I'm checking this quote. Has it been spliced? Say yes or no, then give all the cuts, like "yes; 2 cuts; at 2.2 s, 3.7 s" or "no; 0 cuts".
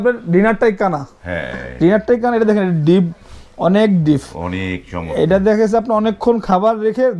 no; 0 cuts